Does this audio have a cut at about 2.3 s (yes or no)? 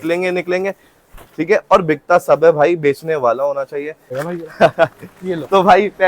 no